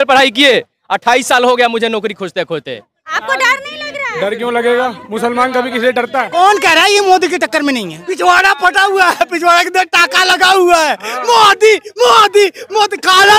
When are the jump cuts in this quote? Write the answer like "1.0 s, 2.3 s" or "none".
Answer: 3.0 s, 6.3 s, 8.0 s